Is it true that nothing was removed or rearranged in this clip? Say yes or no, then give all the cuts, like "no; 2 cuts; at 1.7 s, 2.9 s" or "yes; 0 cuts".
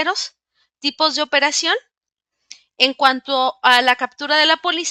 yes; 0 cuts